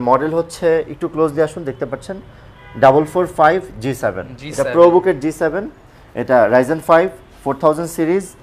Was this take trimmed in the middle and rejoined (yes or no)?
no